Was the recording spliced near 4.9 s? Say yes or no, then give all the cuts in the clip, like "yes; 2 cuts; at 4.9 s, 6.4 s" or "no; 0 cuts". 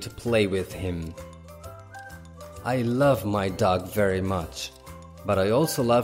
no; 2 cuts; at 1.2 s, 2.6 s